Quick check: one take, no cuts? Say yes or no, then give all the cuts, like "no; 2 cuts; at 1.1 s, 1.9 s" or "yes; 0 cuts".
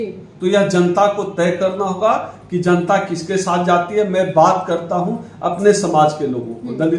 yes; 0 cuts